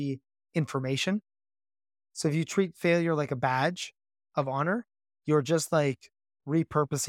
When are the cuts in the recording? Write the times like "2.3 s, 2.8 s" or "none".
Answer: none